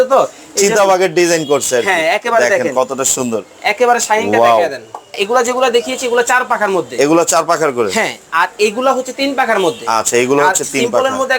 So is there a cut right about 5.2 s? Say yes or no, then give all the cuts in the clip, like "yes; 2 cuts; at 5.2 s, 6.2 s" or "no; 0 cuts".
yes; 1 cut; at 5.2 s